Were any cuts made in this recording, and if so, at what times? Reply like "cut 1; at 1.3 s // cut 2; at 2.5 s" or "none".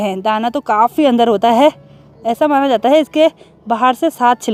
none